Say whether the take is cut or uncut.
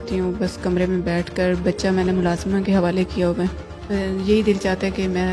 cut